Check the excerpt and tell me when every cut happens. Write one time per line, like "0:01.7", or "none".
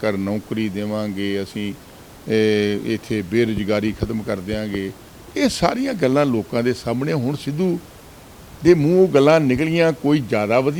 none